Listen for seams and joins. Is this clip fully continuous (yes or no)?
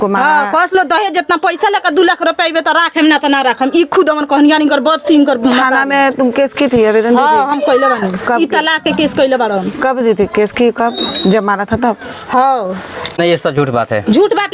no